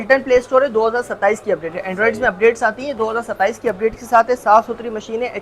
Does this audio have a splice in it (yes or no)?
no